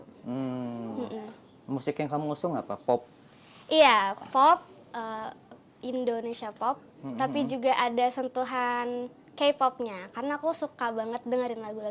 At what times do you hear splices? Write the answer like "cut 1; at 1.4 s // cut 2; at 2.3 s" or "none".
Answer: none